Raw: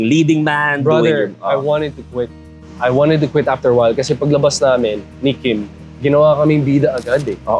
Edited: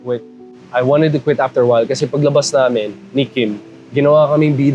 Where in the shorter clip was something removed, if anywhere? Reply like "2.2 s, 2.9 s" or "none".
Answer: none